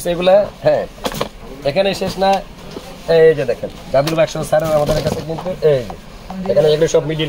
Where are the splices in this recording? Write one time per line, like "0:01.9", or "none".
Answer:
none